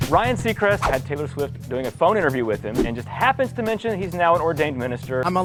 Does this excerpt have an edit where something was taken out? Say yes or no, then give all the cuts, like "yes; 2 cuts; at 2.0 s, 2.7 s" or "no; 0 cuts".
no; 0 cuts